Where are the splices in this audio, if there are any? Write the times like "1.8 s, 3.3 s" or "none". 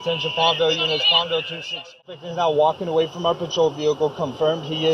2.0 s